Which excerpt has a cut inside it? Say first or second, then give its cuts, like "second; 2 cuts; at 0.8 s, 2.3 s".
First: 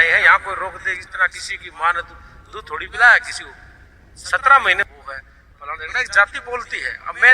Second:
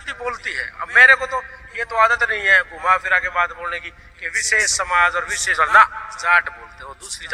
first; 1 cut; at 4.9 s